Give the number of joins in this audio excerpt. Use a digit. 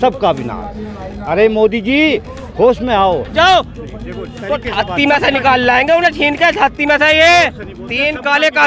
1